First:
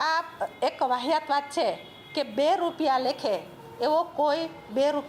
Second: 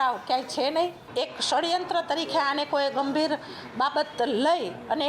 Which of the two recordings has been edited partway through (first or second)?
second